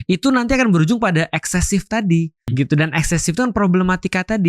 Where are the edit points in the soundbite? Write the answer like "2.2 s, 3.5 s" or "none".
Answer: 2.5 s